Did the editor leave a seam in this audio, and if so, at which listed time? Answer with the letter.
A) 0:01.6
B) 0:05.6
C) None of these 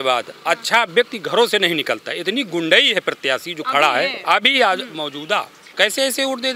B